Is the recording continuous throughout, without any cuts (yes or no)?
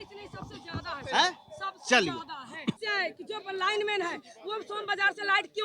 no